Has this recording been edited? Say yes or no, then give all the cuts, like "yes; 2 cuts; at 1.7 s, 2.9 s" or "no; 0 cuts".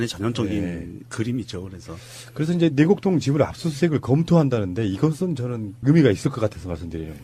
yes; 1 cut; at 1.4 s